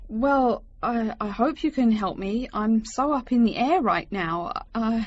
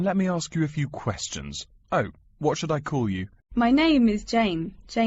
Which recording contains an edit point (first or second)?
second